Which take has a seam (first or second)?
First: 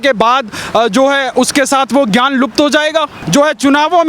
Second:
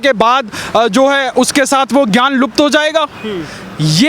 first